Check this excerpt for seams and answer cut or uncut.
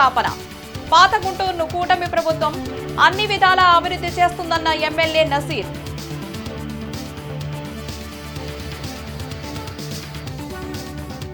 uncut